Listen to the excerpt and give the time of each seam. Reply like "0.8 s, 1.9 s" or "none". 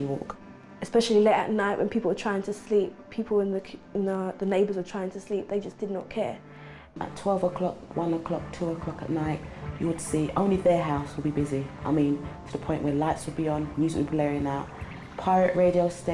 none